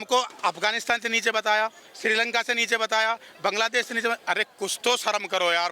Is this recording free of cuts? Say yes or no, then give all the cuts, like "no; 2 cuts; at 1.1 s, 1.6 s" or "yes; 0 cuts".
yes; 0 cuts